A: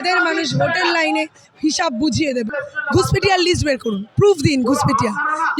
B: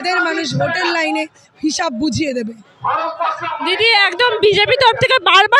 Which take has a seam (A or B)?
A